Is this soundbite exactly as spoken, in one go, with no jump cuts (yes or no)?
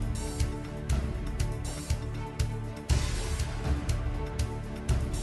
no